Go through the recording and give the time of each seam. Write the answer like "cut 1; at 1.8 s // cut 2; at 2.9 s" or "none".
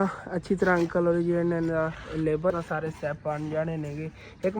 cut 1; at 2.5 s